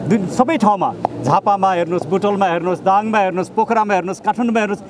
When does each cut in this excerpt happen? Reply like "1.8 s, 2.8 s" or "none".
none